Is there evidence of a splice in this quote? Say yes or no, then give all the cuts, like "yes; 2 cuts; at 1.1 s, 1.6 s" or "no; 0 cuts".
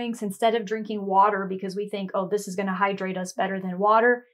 no; 0 cuts